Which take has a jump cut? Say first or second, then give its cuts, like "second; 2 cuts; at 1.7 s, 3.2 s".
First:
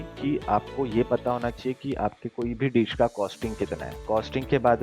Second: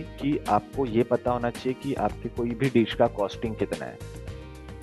first; 1 cut; at 3.9 s